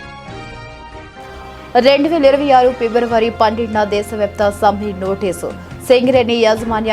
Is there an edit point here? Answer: no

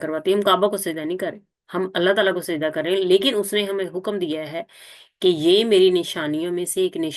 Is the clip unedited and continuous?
yes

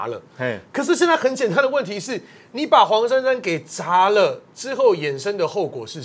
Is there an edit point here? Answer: no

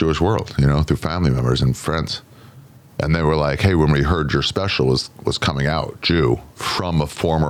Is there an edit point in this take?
no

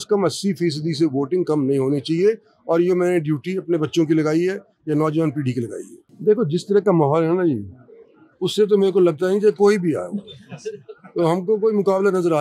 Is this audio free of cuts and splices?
no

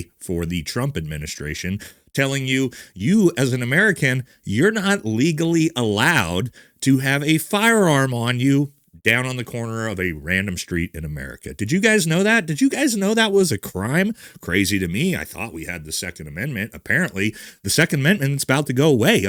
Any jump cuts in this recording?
no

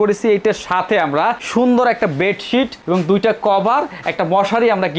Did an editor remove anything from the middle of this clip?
no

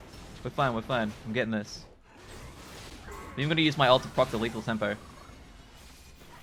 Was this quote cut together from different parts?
no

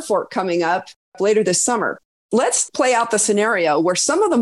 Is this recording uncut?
no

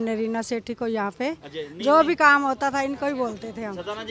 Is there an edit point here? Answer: no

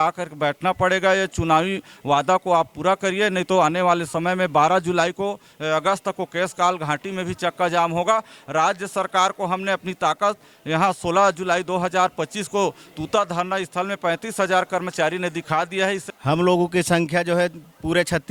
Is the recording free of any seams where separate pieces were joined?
yes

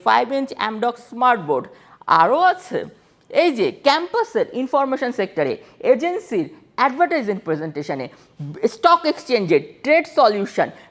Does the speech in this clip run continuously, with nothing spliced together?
yes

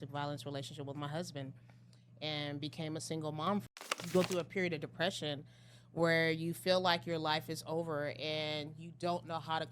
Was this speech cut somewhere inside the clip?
yes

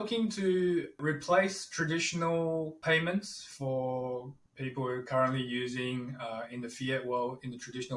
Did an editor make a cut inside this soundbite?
yes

